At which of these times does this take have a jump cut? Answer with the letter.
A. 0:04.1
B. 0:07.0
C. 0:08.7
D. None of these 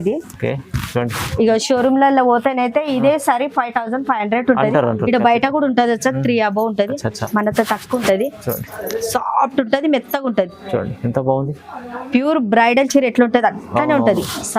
C